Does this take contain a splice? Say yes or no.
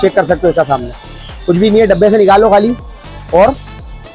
no